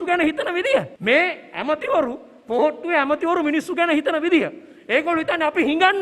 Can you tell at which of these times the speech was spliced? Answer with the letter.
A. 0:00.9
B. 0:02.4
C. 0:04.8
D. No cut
A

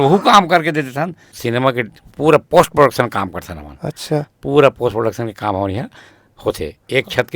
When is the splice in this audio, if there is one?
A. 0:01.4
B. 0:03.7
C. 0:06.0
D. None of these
A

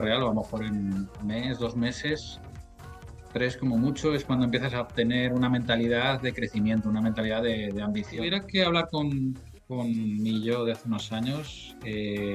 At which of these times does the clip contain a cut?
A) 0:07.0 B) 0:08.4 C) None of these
B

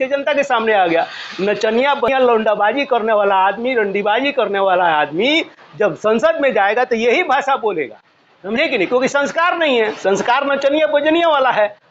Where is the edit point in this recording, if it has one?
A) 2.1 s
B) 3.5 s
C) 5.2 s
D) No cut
A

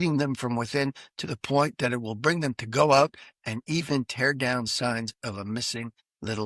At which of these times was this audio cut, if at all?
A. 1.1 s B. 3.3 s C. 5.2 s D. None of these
D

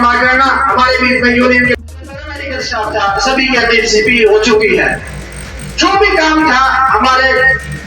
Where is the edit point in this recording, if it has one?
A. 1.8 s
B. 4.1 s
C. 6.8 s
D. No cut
A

